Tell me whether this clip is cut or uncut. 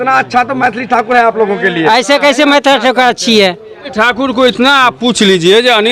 cut